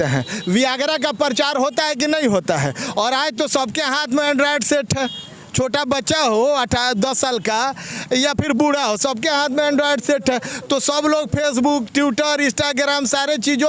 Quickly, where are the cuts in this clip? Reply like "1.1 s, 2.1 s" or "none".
none